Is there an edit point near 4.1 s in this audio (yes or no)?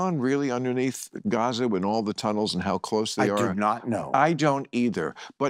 no